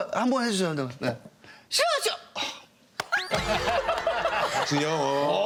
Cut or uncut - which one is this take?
uncut